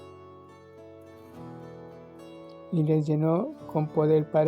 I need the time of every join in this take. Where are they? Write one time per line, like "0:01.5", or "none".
0:02.7